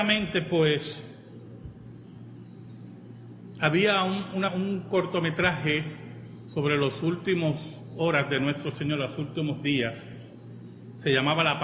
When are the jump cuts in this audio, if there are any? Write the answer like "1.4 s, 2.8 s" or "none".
7.2 s